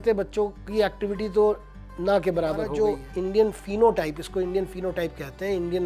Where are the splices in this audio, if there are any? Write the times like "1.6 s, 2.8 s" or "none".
2.7 s